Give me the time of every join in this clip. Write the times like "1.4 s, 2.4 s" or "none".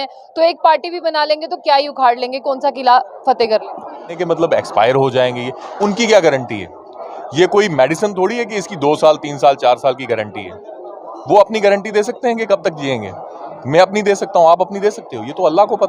4.2 s